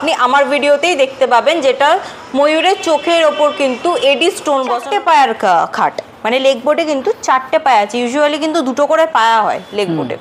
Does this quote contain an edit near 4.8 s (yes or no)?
yes